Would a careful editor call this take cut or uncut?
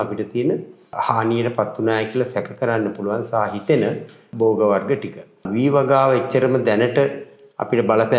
cut